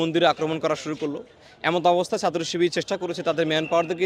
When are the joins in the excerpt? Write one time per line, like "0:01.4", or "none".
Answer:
none